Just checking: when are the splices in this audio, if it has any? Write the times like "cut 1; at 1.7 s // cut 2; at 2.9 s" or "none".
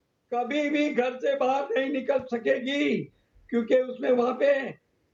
none